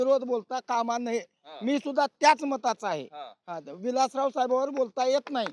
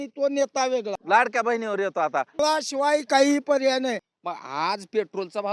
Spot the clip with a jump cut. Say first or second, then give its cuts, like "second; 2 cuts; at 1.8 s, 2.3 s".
second; 3 cuts; at 1.0 s, 2.3 s, 4.1 s